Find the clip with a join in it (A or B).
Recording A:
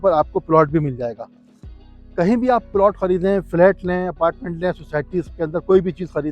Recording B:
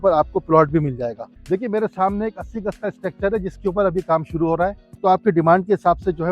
B